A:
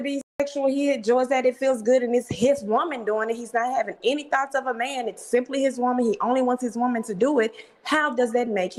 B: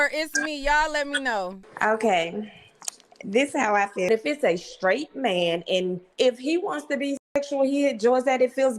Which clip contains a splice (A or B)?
B